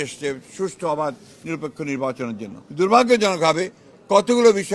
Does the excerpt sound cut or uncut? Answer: cut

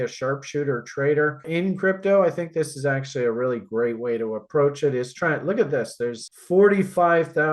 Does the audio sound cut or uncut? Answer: cut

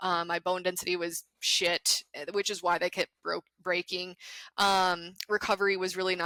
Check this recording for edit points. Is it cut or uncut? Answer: uncut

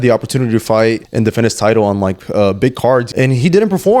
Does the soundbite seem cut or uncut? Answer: cut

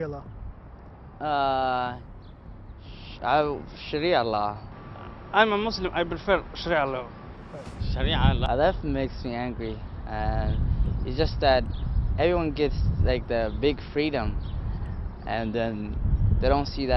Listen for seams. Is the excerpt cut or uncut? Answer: cut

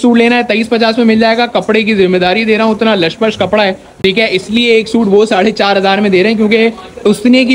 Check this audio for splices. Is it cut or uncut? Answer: uncut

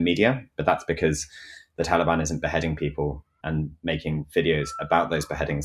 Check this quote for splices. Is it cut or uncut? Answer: cut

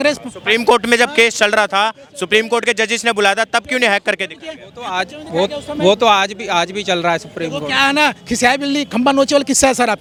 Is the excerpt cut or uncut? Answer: uncut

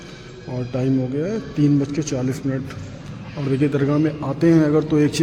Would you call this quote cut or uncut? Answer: uncut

